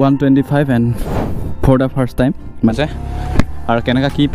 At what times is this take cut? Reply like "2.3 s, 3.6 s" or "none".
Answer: 2.7 s

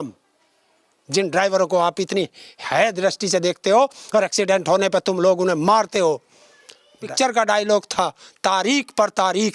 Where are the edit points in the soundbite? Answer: 7.1 s

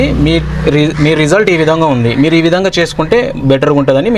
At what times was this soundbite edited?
none

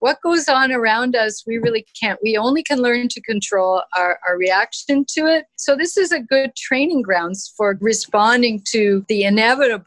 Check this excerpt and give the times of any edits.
5.5 s, 7.8 s, 9.0 s

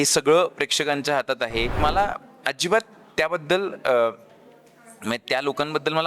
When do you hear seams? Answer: 1.8 s

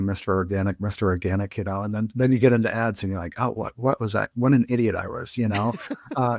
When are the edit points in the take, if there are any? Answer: none

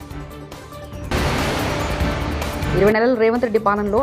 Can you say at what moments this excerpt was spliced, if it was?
1.1 s, 2.7 s

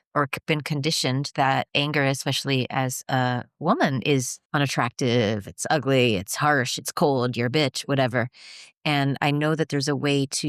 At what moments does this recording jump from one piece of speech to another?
1.7 s, 4.4 s

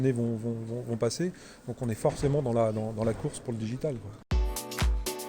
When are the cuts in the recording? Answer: 4.3 s

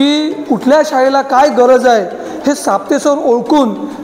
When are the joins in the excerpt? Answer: none

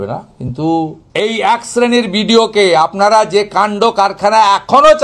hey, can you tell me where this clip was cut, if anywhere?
1.0 s

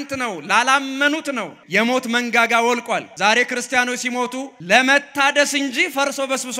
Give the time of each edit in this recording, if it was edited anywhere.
1.5 s, 3.1 s, 4.5 s

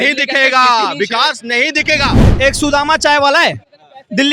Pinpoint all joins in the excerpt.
2.2 s

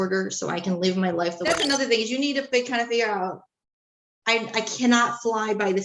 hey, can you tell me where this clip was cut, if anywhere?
1.4 s

